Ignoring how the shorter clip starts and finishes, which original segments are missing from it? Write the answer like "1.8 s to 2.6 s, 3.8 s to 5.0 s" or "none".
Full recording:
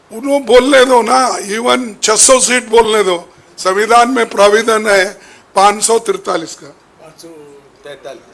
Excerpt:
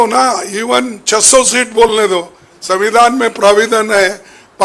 none